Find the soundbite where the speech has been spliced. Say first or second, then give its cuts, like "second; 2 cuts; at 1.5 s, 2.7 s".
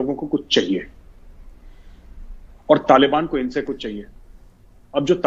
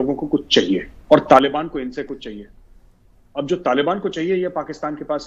second; 1 cut; at 0.9 s